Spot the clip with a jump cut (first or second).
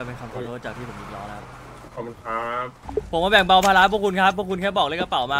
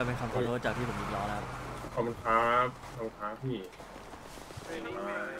first